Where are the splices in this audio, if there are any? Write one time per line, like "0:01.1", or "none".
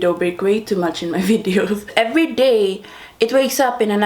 0:01.9